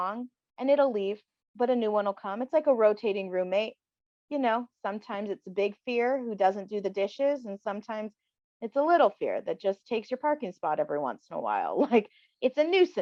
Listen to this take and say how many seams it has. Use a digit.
0